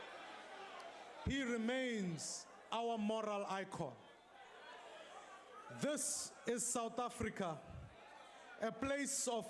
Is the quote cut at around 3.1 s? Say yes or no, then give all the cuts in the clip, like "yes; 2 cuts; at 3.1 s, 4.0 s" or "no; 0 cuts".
yes; 1 cut; at 3.1 s